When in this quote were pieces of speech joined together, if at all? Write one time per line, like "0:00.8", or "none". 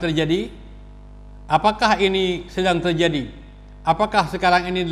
none